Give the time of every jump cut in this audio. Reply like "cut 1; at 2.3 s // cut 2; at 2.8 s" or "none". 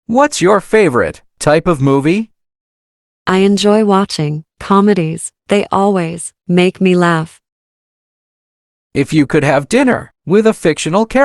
cut 1; at 1.2 s

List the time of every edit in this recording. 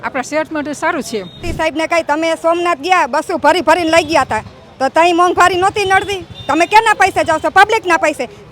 cut 1; at 1.4 s

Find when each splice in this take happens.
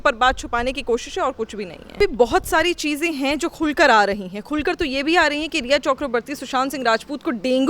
cut 1; at 2.0 s

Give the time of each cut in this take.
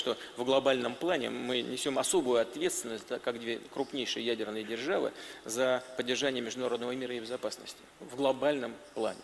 cut 1; at 4.6 s

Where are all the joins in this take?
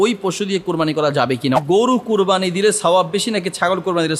cut 1; at 1.6 s

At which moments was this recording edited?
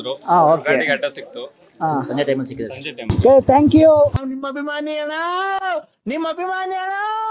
cut 1; at 3.0 s

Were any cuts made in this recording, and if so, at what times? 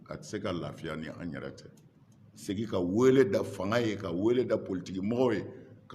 cut 1; at 2.4 s

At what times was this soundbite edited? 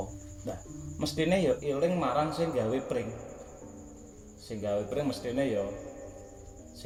none

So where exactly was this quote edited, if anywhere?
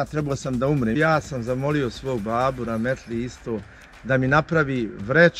cut 1; at 1.0 s

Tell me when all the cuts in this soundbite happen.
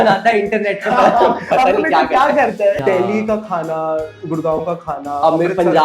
cut 1; at 2.8 s

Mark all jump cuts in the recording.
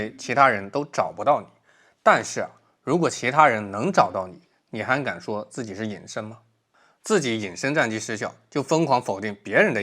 cut 1; at 6.4 s

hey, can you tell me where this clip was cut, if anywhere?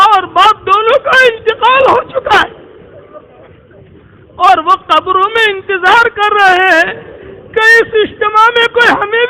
none

